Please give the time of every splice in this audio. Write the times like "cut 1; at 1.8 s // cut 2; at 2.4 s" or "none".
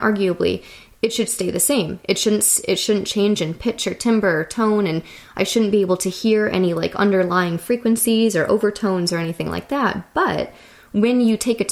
none